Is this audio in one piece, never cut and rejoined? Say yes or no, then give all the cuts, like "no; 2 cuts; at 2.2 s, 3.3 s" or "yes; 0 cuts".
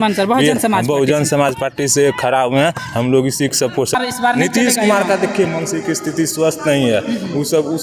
no; 1 cut; at 3.9 s